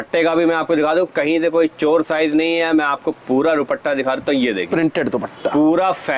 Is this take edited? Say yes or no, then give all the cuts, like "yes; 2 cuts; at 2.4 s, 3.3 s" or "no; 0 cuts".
no; 0 cuts